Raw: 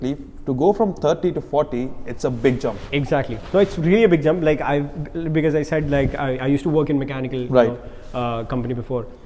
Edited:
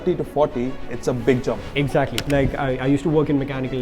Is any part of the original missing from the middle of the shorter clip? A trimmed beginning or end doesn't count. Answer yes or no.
yes